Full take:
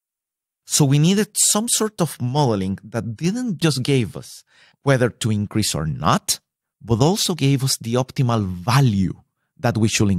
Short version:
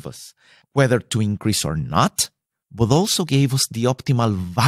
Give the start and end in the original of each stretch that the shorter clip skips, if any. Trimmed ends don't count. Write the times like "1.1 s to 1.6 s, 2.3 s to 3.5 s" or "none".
none